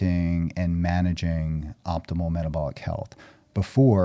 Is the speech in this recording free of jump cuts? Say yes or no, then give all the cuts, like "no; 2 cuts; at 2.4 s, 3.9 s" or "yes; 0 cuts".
yes; 0 cuts